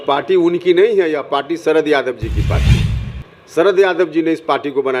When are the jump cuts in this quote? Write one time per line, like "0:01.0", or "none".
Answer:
none